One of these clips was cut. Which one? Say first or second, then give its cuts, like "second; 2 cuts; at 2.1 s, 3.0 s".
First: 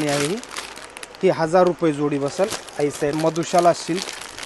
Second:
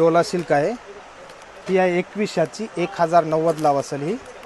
first; 1 cut; at 3.2 s